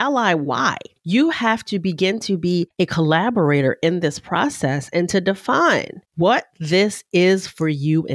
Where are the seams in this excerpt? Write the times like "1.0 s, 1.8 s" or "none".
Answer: 0.9 s, 2.7 s, 6.5 s